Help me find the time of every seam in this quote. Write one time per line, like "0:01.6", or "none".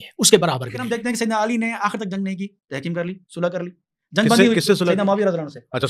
0:01.0